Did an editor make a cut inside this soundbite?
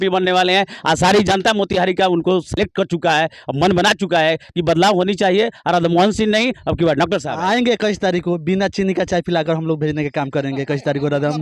yes; 1 cut; at 7.3 s

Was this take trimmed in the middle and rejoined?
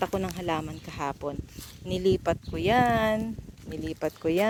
no; 0 cuts

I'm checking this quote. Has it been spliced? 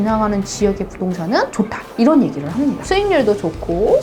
yes; 1 cut; at 2.8 s

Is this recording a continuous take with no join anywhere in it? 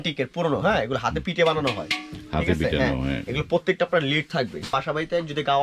no; 1 cut; at 4.7 s

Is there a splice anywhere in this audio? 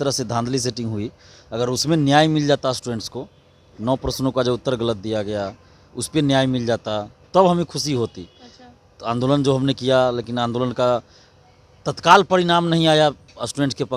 no; 0 cuts

